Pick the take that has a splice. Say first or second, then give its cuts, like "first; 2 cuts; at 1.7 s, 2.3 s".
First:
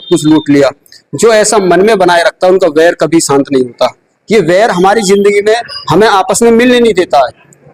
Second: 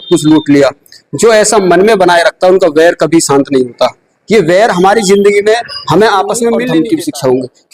second; 1 cut; at 6.6 s